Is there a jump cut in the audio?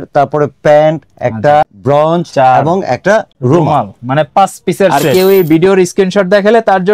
yes; 3 cuts; at 1.8 s, 3.3 s, 5.0 s

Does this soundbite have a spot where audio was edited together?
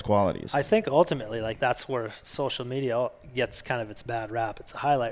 yes; 1 cut; at 1.5 s

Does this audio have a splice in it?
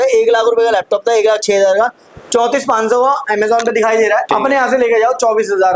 yes; 1 cut; at 4.3 s

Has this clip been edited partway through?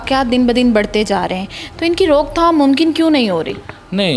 no; 0 cuts

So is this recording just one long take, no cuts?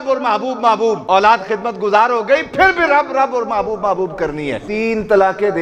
no; 2 cuts; at 1.0 s, 4.6 s

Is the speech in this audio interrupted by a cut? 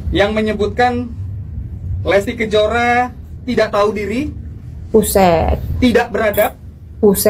no; 0 cuts

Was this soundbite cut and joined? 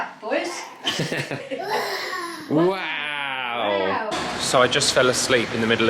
yes; 2 cuts; at 1.4 s, 4.1 s

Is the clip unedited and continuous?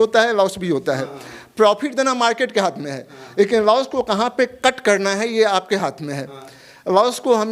yes; 0 cuts

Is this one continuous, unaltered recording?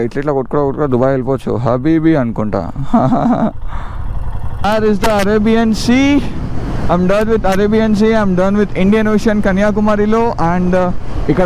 no; 1 cut; at 4.0 s

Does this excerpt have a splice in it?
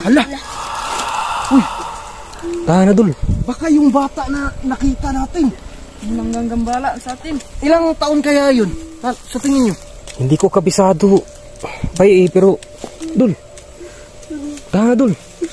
no; 0 cuts

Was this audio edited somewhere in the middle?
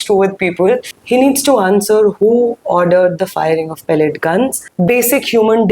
yes; 2 cuts; at 0.9 s, 4.6 s

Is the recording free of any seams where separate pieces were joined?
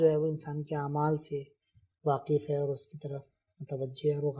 yes; 0 cuts

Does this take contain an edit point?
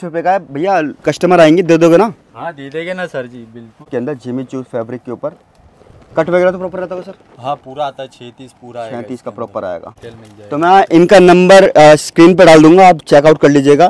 yes; 2 cuts; at 3.9 s, 10.0 s

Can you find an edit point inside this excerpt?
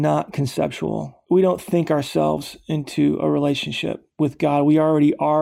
yes; 1 cut; at 1.1 s

